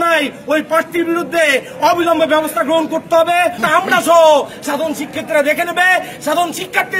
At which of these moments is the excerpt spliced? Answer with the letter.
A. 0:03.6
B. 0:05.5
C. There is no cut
A